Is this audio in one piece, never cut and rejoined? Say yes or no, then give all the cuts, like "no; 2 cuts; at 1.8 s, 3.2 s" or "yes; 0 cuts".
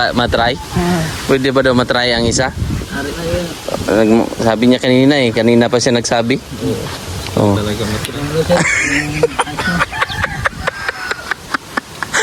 yes; 0 cuts